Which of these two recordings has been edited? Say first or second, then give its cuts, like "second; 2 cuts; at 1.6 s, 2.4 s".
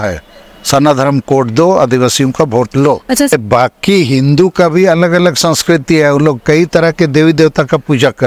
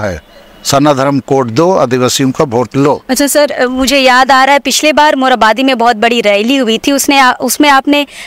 first; 1 cut; at 3.3 s